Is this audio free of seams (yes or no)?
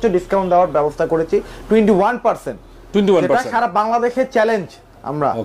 yes